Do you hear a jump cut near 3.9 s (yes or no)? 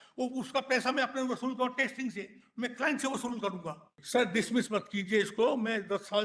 yes